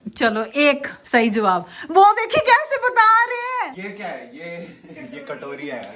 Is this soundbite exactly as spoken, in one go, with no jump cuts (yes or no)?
no